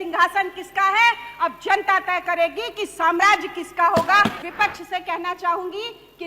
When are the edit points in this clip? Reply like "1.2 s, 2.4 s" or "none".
4.4 s